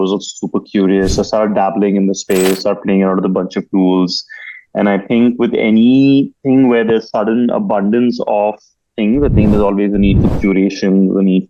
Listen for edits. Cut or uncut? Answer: uncut